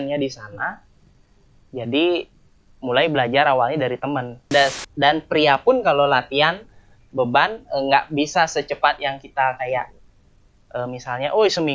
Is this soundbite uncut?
no; 1 cut; at 4.5 s

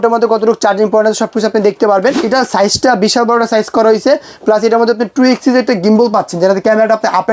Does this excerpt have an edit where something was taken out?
yes; 1 cut; at 2.2 s

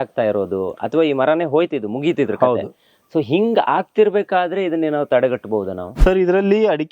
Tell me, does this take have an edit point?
yes; 1 cut; at 5.8 s

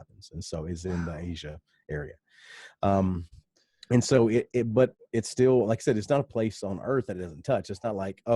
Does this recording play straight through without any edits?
yes; 0 cuts

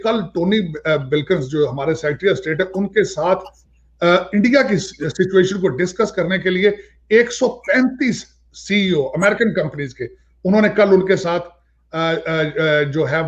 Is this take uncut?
yes; 0 cuts

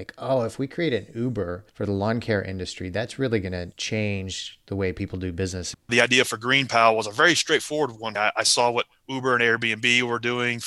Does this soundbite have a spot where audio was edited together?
yes; 4 cuts; at 1.6 s, 3.7 s, 5.9 s, 8.0 s

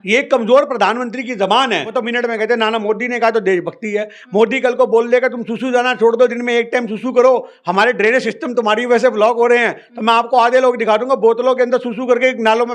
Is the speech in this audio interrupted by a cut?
yes; 1 cut; at 1.9 s

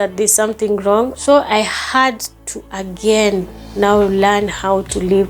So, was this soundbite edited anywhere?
yes; 1 cut; at 1.2 s

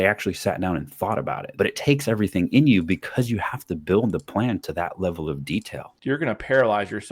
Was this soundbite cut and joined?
yes; 2 cuts; at 1.4 s, 5.9 s

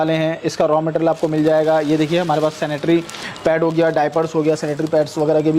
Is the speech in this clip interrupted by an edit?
no; 0 cuts

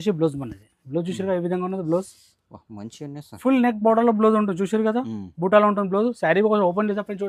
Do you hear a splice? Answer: no; 0 cuts

